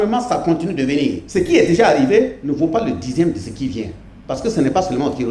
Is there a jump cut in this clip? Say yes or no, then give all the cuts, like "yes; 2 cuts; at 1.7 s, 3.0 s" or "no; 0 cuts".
yes; 2 cuts; at 1.2 s, 2.4 s